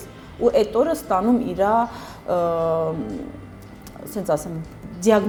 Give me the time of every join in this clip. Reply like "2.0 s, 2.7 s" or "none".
none